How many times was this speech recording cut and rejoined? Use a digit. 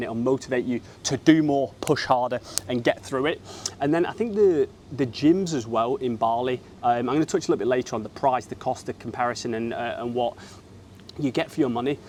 0